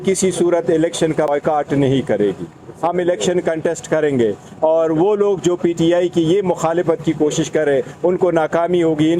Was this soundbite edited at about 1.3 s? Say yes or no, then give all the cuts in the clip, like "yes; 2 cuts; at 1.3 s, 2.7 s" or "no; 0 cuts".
yes; 1 cut; at 1.3 s